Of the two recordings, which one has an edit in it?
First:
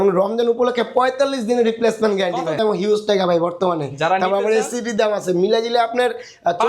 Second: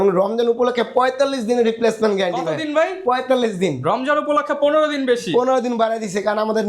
first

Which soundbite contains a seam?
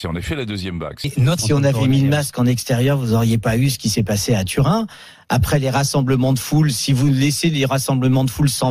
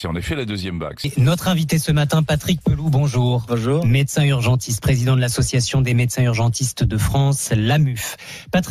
first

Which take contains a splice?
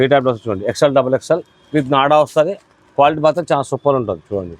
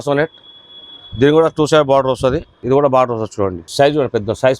second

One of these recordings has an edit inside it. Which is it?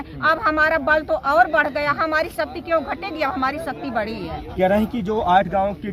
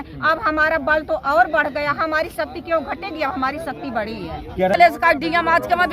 second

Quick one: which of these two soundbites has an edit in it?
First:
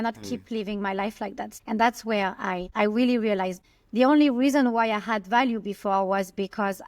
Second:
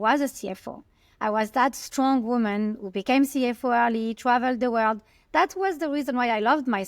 first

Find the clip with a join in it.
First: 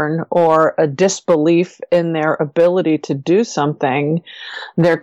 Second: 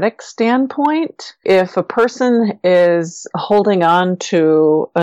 second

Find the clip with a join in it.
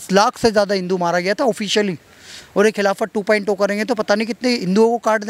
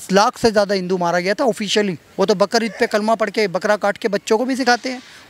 second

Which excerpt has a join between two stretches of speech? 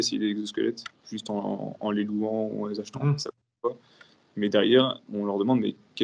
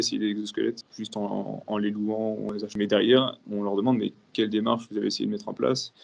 second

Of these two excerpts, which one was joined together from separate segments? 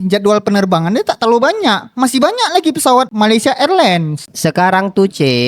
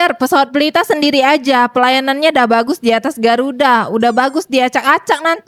first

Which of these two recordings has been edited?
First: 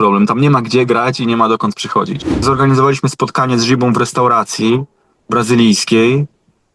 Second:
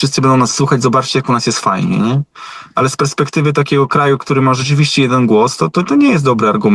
first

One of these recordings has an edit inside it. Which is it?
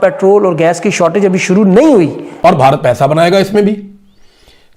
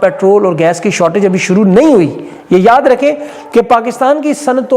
first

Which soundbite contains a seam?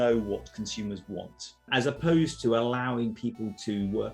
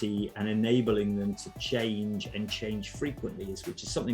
first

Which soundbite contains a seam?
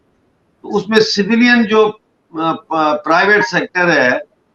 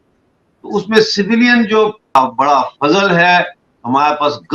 second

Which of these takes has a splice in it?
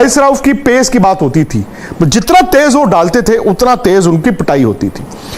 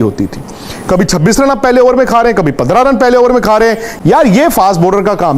second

